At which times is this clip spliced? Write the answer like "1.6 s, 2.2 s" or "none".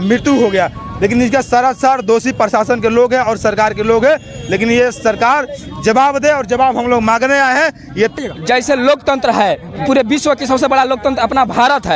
8.2 s